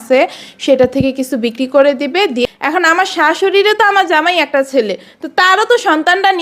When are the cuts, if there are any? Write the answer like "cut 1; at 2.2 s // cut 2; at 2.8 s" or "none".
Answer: cut 1; at 2.4 s

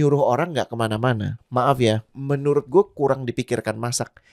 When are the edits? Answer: cut 1; at 1.3 s // cut 2; at 2.1 s

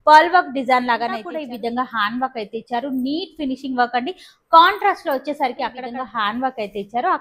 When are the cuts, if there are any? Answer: cut 1; at 1.3 s // cut 2; at 5.8 s

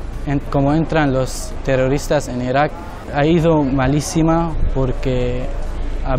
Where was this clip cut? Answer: cut 1; at 1.5 s // cut 2; at 3.0 s

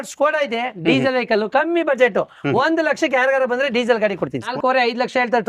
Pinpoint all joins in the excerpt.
cut 1; at 4.4 s

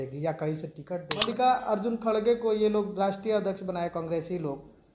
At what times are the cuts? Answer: cut 1; at 1.2 s

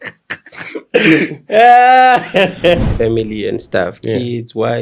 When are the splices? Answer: cut 1; at 2.9 s

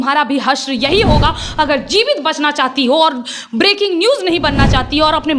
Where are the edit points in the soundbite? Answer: none

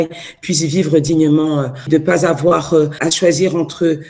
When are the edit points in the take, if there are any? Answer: cut 1; at 1.9 s // cut 2; at 2.9 s

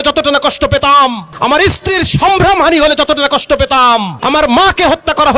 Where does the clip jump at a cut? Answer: cut 1; at 1.3 s // cut 2; at 4.1 s

